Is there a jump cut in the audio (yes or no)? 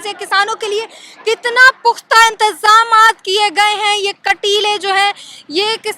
no